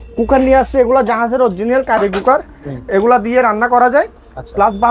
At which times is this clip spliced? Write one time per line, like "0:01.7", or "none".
none